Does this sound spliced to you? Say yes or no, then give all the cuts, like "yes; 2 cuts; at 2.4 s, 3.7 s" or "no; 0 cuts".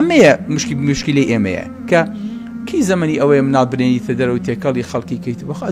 no; 0 cuts